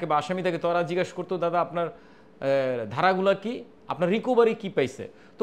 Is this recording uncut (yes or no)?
yes